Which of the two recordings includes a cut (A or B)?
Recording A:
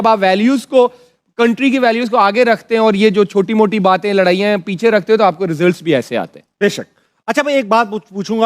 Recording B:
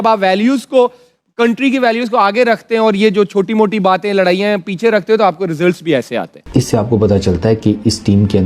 B